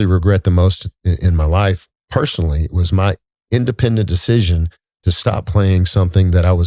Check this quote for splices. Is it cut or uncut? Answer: uncut